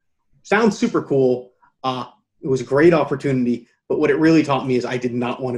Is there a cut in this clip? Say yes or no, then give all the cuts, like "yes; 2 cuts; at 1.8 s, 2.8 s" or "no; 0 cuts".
no; 0 cuts